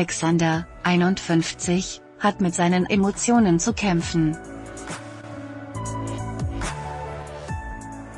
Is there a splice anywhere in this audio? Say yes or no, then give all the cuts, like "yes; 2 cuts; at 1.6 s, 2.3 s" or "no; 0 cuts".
yes; 1 cut; at 4.4 s